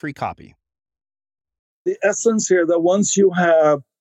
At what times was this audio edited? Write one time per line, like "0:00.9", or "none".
0:01.9